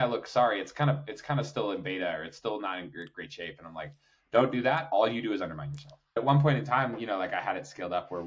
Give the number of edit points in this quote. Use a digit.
1